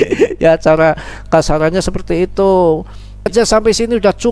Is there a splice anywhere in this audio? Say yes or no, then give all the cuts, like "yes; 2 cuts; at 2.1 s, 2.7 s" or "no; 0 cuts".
yes; 1 cut; at 3.3 s